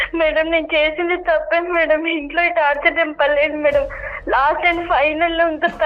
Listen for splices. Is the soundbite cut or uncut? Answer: uncut